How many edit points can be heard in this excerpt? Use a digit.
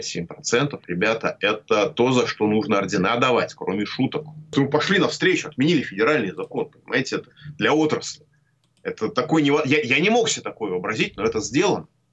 1